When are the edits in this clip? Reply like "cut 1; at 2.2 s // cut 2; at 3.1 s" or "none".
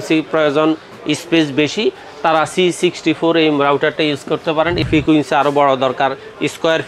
cut 1; at 4.8 s